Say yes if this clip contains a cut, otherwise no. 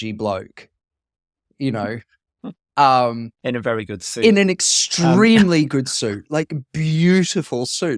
yes